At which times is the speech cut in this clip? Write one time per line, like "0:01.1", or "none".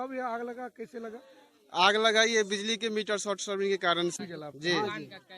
0:04.1